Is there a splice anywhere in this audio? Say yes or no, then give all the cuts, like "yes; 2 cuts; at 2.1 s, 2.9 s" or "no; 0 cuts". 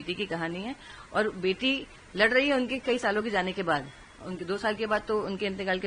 no; 0 cuts